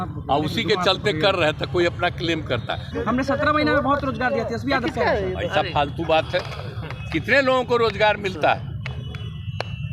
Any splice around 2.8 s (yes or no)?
yes